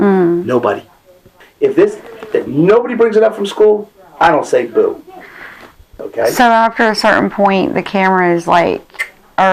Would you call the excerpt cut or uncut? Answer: cut